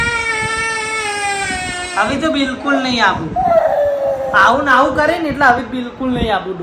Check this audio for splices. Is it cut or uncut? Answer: uncut